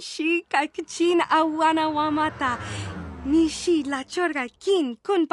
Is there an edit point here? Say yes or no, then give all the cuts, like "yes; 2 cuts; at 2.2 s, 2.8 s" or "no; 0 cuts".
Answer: no; 0 cuts